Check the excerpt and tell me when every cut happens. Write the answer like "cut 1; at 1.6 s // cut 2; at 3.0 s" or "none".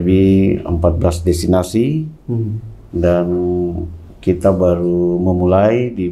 none